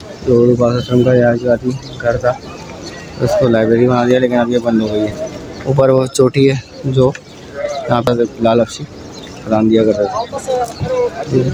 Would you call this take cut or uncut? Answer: uncut